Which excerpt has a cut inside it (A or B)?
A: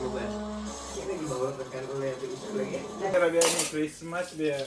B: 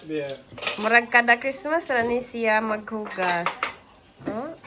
A